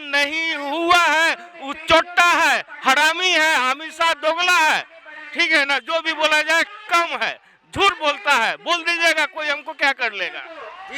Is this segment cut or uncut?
uncut